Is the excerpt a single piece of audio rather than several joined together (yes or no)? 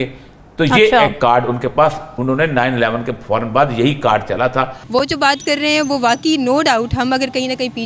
no